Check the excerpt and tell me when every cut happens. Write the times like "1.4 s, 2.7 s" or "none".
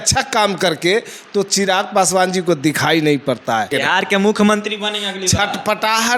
3.7 s